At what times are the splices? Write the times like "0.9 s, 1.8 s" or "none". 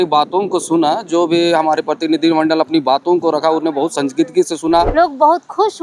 4.9 s